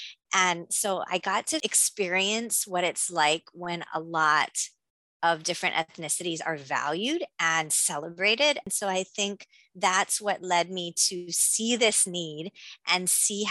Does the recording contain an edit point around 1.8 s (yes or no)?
yes